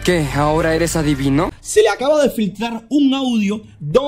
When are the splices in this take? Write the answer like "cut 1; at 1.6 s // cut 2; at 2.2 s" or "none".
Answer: cut 1; at 1.5 s